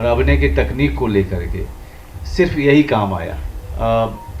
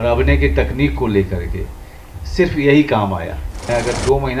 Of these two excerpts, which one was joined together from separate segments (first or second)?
second